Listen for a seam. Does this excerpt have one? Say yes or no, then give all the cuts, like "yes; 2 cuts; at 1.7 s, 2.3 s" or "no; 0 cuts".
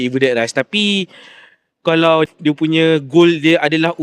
yes; 1 cut; at 2.3 s